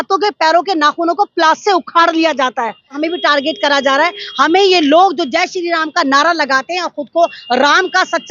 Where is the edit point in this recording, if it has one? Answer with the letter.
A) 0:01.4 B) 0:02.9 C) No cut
B